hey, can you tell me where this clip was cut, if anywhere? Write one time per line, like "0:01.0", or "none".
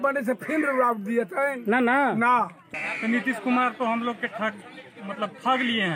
0:02.6